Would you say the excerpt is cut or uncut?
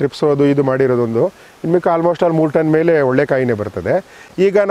uncut